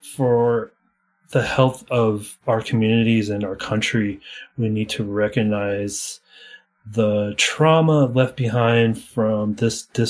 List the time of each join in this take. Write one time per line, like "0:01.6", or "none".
none